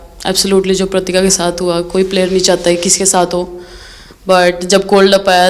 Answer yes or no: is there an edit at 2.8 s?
no